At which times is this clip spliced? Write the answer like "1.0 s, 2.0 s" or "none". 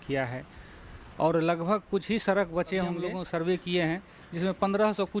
3.1 s